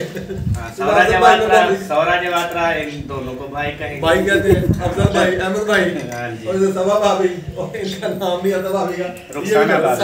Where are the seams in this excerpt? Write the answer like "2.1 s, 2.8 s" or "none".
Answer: none